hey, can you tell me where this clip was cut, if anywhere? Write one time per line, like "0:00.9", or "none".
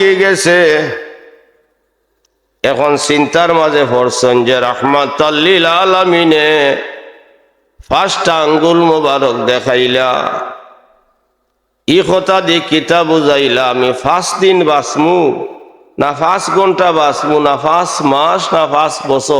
none

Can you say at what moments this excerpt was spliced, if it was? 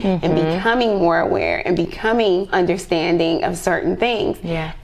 0:02.5

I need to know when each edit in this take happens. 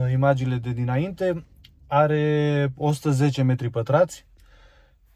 none

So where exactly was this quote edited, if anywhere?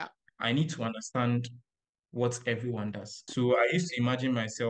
0:03.3

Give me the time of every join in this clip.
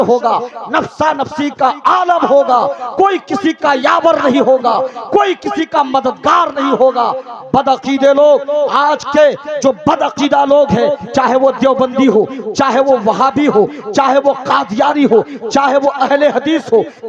none

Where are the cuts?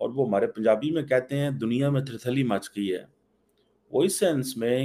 none

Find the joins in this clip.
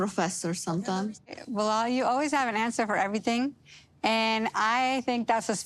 0:01.3

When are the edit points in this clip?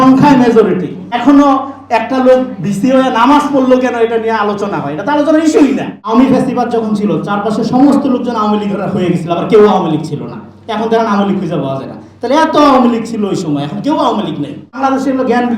0:01.1
0:06.0
0:14.8

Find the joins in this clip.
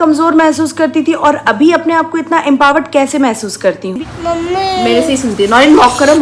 0:04.0

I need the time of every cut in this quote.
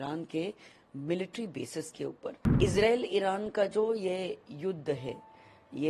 0:02.5

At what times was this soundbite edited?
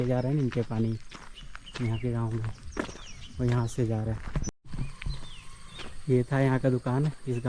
0:04.6

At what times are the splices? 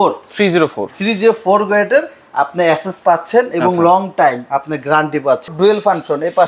0:05.5

